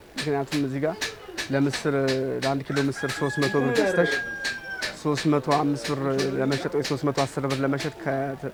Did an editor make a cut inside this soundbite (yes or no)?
no